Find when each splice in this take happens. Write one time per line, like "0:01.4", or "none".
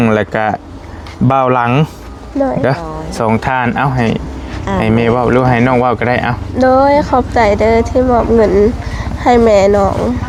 none